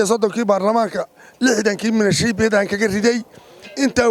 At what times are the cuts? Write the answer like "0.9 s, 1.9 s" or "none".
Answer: none